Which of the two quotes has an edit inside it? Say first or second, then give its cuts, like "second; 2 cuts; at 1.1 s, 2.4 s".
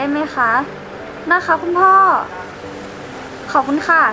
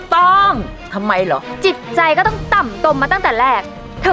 second; 1 cut; at 1.5 s